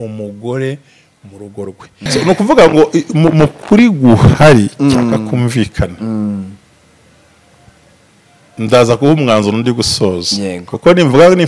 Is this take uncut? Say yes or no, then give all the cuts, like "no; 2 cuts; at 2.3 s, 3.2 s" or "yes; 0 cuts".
no; 1 cut; at 2.0 s